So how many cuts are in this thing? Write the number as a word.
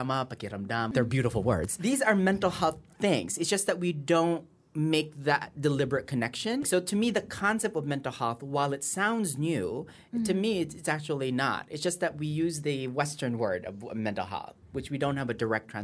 three